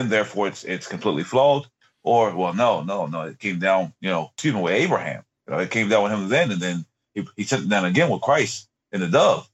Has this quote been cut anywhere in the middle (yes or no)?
yes